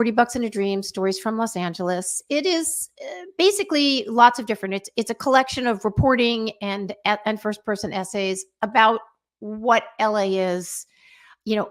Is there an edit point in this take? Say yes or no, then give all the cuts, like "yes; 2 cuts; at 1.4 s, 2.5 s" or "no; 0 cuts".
no; 0 cuts